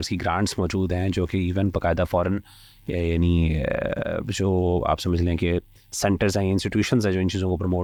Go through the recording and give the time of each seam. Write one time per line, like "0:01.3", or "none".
none